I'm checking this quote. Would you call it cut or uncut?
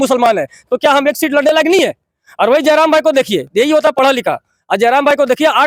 uncut